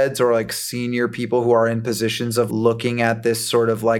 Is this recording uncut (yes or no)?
no